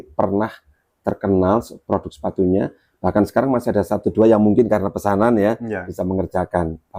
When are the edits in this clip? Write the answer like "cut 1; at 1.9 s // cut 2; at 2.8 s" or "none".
none